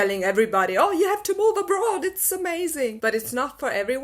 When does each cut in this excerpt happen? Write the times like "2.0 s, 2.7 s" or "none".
3.0 s